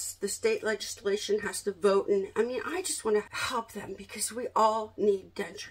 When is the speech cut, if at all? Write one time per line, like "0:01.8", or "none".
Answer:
0:03.4